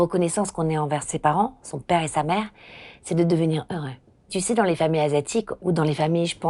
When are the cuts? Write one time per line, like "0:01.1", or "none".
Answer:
0:01.1
0:04.3
0:05.5